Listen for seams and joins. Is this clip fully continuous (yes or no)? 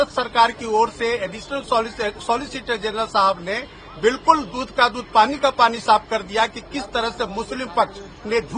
yes